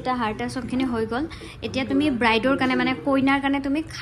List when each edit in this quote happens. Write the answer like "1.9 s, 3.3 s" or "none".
none